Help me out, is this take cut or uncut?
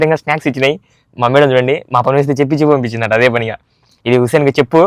uncut